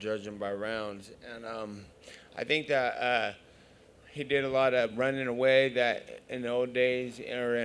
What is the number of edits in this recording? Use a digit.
1